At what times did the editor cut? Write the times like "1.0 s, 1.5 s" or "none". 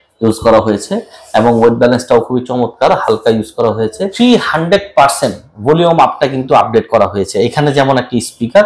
4.1 s